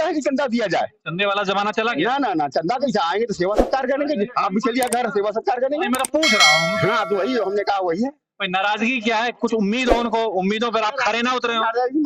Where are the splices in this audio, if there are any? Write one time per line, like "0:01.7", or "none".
none